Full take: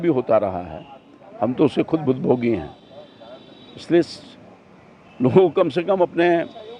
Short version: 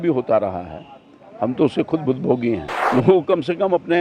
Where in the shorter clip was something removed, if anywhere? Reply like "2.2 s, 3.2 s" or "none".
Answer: 2.7 s